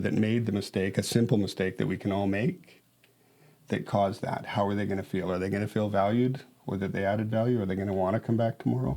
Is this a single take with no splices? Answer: yes; 0 cuts

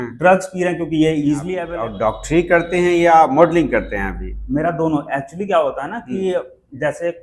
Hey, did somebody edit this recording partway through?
yes; 1 cut; at 1.6 s

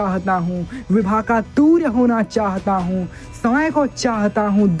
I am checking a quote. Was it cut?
no; 0 cuts

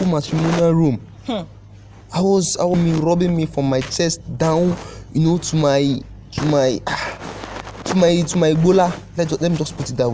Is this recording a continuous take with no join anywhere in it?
no; 1 cut; at 2.7 s

